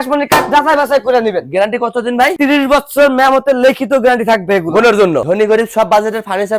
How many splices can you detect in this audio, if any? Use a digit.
1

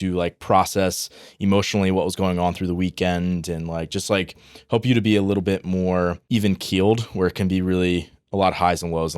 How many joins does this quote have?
1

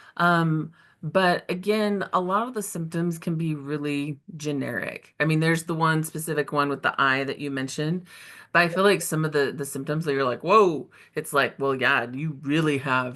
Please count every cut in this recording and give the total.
0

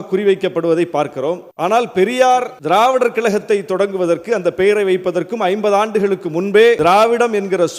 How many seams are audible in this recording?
3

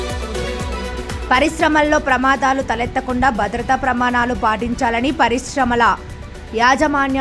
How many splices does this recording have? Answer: 1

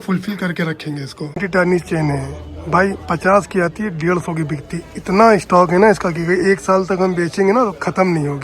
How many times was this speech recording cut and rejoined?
1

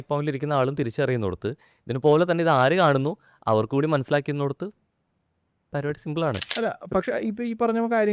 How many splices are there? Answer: 1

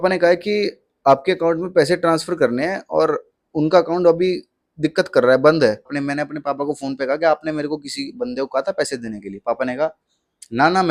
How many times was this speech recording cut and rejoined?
1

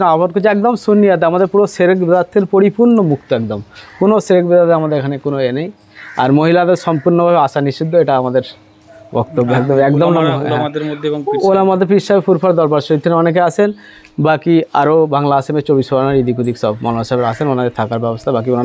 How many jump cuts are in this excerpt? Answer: 0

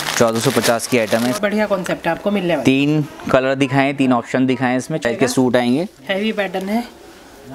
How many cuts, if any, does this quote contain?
2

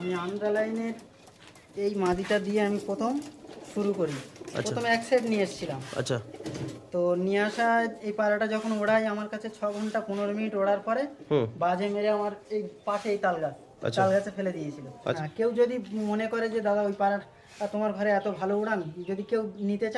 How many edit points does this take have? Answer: 1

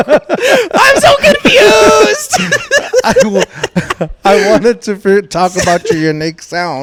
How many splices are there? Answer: 0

